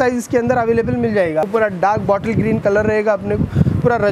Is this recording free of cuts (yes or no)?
no